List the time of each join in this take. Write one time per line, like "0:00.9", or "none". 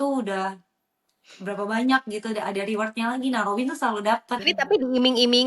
0:04.5